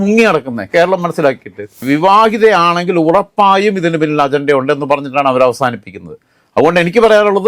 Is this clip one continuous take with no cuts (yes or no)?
no